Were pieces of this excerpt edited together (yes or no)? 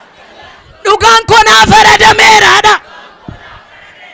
no